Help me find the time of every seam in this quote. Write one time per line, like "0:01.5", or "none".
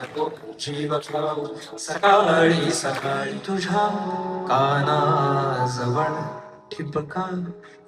0:03.3